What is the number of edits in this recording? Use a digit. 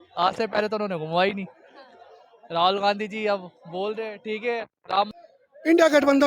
1